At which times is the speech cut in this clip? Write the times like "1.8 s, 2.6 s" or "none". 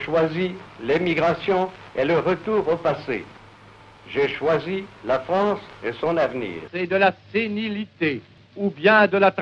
6.6 s, 8.4 s